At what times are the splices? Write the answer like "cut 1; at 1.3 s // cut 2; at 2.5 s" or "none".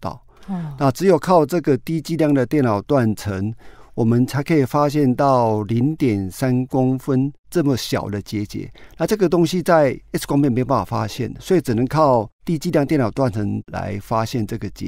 cut 1; at 10.1 s // cut 2; at 12.4 s // cut 3; at 13.6 s